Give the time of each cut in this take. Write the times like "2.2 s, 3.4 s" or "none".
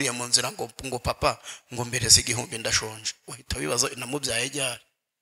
none